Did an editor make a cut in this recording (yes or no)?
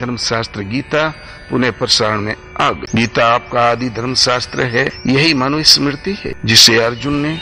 yes